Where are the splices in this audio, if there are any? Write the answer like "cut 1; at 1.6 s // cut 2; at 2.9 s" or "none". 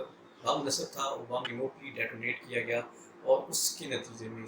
cut 1; at 1.5 s